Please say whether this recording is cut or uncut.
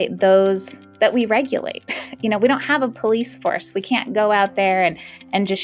uncut